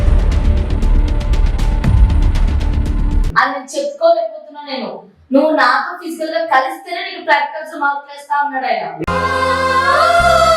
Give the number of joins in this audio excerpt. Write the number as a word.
one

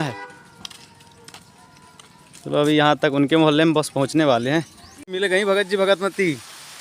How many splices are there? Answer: one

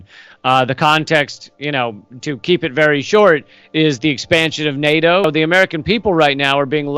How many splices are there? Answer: one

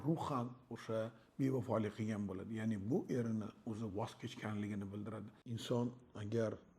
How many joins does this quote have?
one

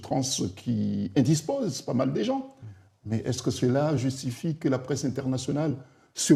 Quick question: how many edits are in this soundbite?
zero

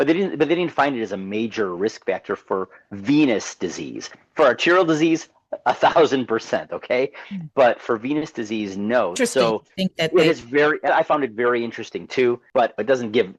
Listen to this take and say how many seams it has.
one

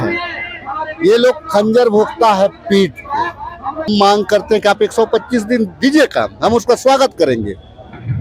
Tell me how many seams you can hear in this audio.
one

